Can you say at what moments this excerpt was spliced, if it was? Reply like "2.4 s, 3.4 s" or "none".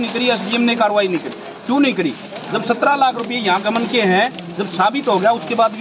none